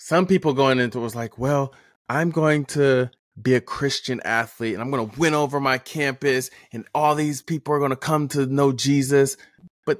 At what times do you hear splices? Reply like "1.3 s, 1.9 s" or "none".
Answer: 3.2 s